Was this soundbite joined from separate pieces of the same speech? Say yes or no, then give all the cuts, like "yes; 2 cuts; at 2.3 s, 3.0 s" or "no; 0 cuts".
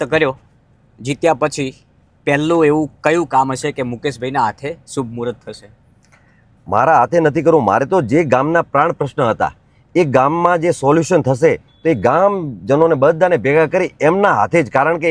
no; 0 cuts